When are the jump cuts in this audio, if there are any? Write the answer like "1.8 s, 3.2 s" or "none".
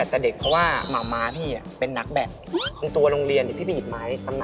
2.8 s